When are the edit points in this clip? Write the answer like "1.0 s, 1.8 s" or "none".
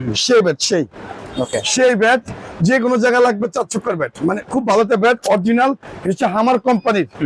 none